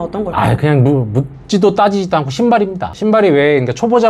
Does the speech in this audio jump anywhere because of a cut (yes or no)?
no